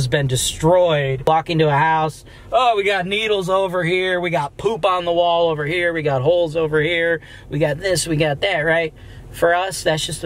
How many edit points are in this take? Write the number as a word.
one